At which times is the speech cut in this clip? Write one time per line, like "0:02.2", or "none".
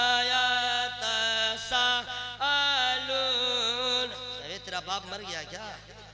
none